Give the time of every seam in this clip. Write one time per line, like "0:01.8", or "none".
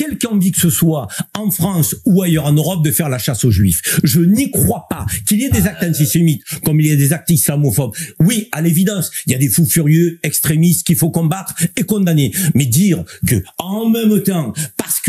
none